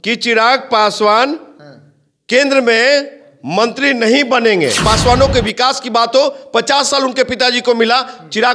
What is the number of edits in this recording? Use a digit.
1